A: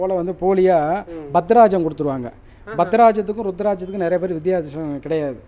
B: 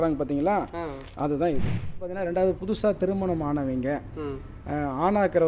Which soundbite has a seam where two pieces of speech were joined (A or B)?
B